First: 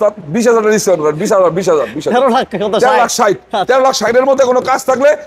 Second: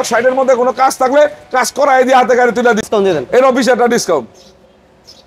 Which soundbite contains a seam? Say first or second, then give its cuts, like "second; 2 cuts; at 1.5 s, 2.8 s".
second; 1 cut; at 2.8 s